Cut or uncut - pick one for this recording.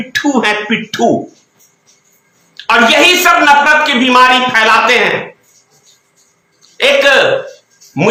uncut